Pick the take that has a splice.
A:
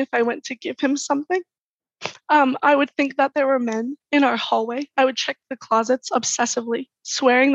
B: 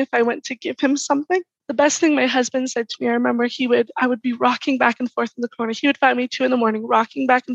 B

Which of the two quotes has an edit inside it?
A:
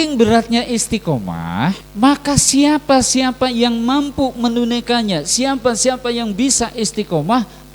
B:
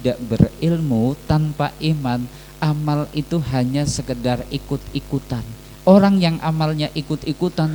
A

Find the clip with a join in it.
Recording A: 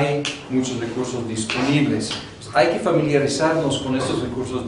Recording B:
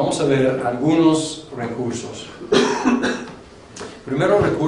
A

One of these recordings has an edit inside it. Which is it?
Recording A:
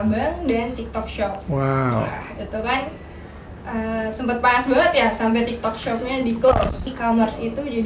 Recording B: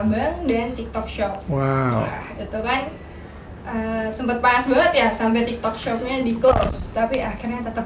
A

